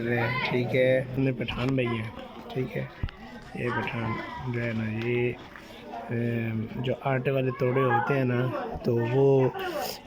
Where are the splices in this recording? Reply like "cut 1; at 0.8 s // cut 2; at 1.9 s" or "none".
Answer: cut 1; at 1.2 s